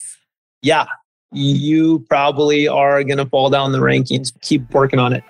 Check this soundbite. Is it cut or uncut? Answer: cut